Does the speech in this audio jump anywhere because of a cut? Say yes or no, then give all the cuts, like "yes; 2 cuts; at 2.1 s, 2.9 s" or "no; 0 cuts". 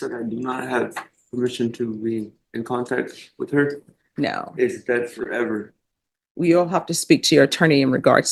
no; 0 cuts